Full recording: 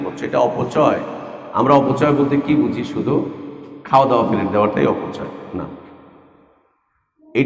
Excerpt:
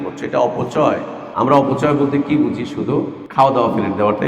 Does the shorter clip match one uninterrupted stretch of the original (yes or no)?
no